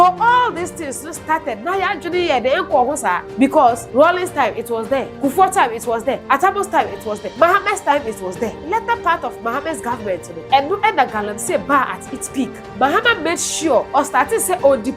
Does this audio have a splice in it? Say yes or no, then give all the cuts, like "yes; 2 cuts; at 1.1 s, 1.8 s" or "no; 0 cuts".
yes; 8 cuts; at 3.6 s, 5.1 s, 6.2 s, 7.2 s, 8.6 s, 10.3 s, 12.6 s, 13.9 s